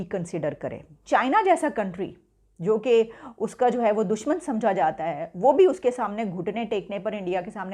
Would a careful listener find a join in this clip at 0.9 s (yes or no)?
yes